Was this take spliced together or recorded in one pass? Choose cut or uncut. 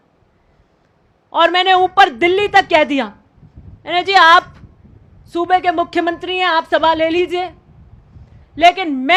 uncut